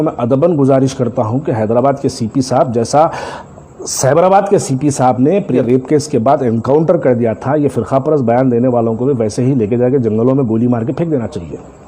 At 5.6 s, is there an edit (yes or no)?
yes